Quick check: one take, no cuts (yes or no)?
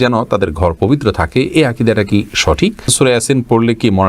no